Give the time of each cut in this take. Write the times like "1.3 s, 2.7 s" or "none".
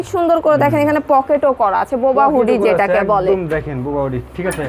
none